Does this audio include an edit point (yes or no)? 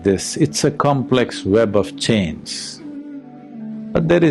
yes